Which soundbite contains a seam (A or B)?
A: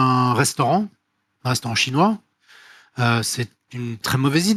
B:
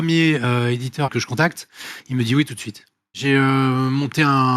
B